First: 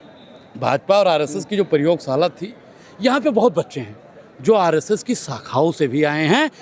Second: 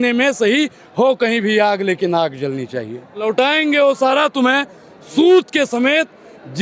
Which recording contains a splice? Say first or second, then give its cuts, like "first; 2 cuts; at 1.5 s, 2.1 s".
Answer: second; 1 cut; at 3.2 s